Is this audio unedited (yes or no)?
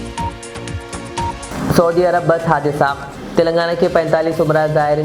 no